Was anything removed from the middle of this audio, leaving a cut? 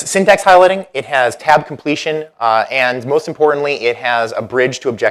no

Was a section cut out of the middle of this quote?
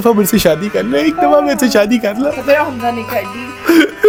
no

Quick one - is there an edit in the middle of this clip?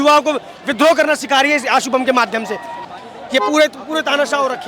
yes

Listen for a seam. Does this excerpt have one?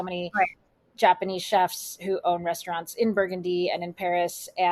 no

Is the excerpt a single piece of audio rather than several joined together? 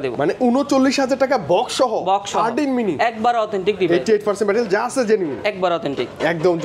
yes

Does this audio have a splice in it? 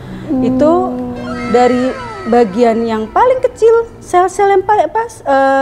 no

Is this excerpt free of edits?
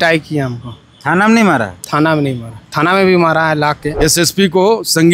no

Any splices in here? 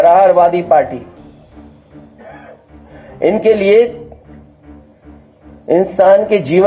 no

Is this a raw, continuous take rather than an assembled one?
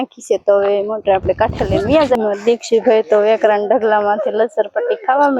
no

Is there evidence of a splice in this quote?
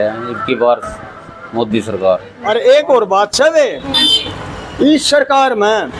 yes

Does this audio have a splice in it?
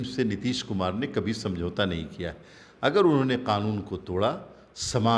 no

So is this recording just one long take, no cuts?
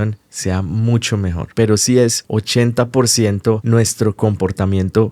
no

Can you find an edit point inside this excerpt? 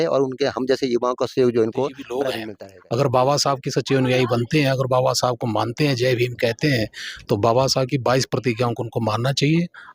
yes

